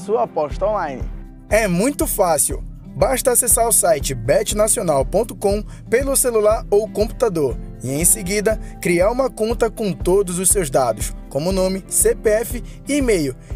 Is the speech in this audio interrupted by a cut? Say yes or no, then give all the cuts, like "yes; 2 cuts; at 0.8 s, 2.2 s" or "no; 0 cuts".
no; 0 cuts